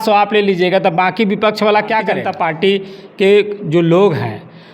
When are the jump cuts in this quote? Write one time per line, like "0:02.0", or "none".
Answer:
0:02.2